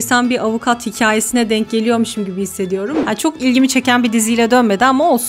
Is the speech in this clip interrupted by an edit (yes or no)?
yes